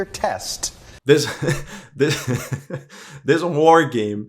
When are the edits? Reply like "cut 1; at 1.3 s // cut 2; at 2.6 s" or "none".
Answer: cut 1; at 0.9 s